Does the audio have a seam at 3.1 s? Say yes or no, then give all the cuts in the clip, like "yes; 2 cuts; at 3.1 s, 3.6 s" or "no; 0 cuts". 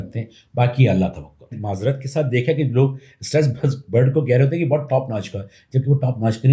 no; 1 cut; at 1.5 s